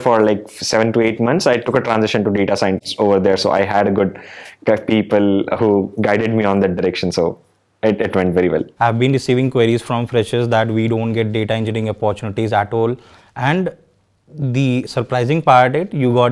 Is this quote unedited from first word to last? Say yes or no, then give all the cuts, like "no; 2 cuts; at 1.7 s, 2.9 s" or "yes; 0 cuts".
yes; 0 cuts